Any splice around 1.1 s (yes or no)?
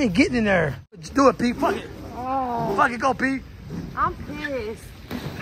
yes